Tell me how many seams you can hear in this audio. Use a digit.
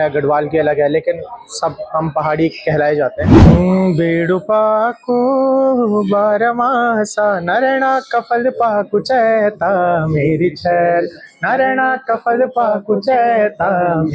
1